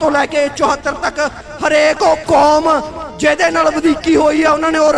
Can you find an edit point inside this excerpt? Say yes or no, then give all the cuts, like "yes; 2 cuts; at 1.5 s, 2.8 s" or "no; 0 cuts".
no; 0 cuts